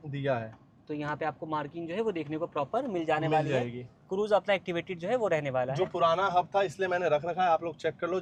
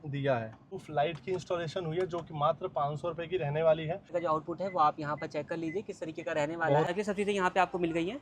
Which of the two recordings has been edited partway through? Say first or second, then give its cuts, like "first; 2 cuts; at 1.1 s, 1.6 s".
second; 3 cuts; at 0.8 s, 4.1 s, 6.9 s